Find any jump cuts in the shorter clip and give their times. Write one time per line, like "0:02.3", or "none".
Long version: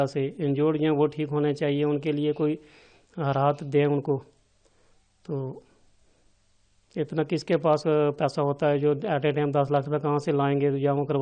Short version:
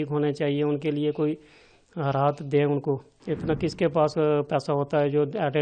0:03.1